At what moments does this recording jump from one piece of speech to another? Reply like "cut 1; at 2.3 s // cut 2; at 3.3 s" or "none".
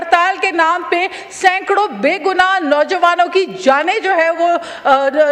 none